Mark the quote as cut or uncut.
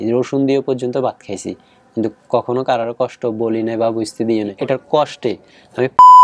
cut